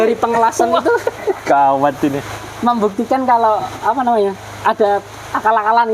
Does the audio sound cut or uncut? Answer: uncut